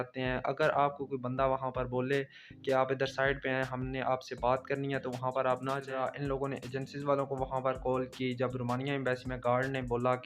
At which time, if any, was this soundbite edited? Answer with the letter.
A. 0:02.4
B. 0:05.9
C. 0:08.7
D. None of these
B